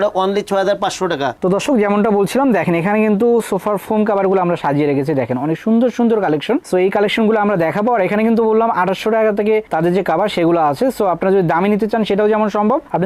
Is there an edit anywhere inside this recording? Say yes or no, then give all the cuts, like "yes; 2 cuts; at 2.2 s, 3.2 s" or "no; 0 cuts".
yes; 1 cut; at 1.3 s